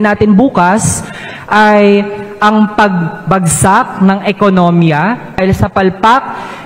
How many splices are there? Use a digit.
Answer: 1